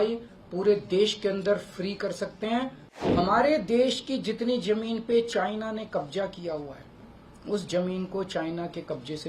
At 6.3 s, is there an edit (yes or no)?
no